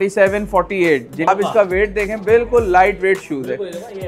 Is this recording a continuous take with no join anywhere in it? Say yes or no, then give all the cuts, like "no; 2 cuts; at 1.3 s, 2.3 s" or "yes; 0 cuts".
no; 1 cut; at 1.3 s